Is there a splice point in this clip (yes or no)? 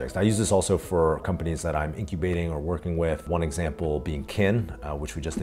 no